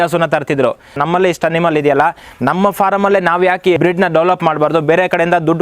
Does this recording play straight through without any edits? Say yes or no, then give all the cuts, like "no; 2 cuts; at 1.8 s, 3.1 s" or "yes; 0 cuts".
no; 2 cuts; at 1.0 s, 3.8 s